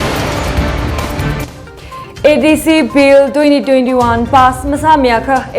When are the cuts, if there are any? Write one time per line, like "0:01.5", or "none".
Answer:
0:01.0